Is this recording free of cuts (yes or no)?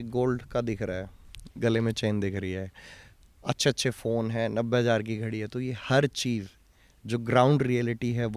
yes